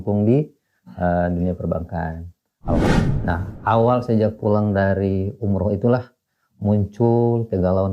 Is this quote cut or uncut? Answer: cut